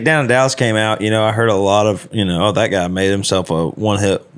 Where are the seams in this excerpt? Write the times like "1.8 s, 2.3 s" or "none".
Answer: 2.1 s